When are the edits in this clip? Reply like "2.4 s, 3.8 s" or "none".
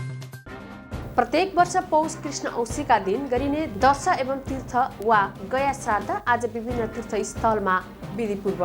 none